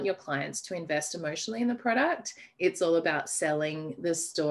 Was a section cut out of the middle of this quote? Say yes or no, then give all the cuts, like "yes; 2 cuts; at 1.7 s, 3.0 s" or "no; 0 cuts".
no; 0 cuts